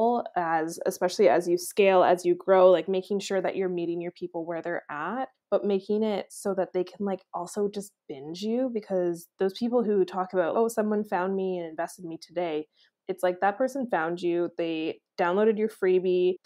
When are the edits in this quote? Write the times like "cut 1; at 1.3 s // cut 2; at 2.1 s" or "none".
cut 1; at 10.5 s